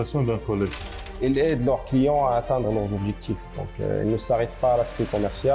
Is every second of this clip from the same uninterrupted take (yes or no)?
no